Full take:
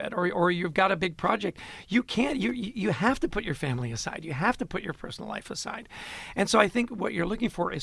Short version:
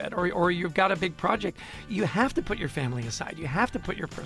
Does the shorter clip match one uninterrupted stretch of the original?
no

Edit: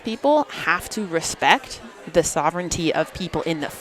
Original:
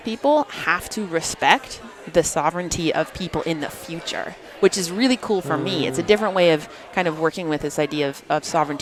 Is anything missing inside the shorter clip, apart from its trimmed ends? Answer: no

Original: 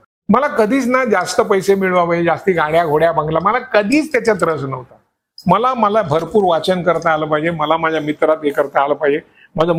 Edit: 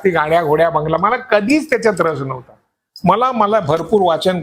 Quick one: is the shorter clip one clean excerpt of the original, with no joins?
yes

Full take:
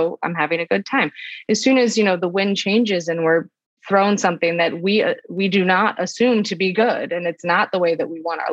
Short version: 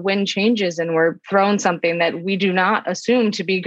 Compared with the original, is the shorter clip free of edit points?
no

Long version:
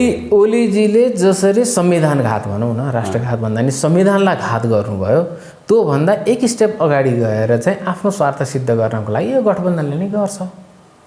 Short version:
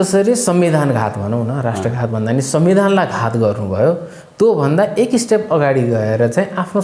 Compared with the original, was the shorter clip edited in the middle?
no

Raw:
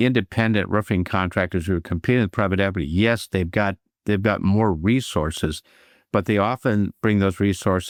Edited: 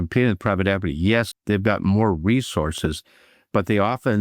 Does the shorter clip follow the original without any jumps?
no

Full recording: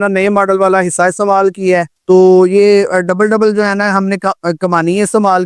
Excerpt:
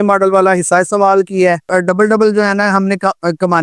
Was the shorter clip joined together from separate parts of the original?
yes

